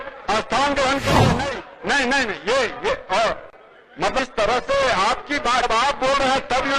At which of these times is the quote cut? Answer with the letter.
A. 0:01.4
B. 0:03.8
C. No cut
A